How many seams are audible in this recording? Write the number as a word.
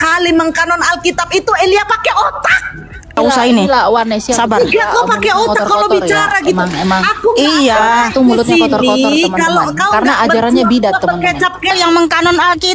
two